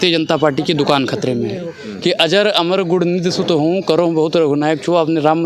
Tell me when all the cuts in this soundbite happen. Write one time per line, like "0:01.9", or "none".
0:01.8

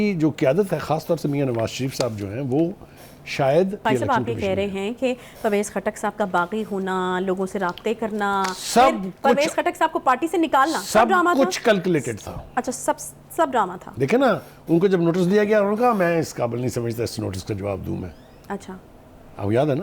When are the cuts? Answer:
0:03.8

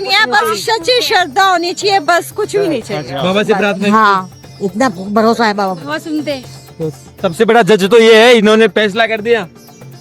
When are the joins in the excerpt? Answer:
0:03.1

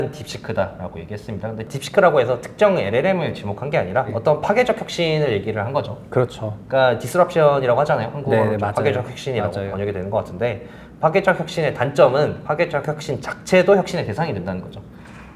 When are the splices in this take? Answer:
0:01.8
0:04.1

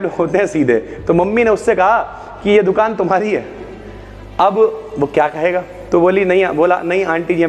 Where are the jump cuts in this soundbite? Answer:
none

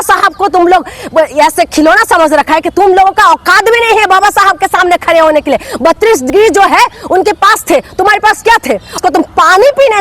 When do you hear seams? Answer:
0:09.0

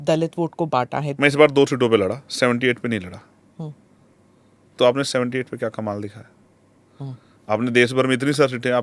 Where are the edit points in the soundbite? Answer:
0:01.0

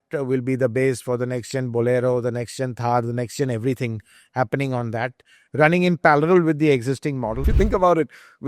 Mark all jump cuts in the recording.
0:07.5

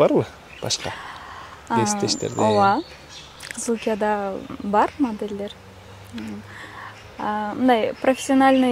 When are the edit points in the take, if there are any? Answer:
none

